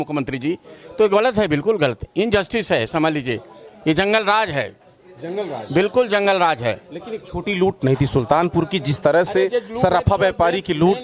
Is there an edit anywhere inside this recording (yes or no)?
no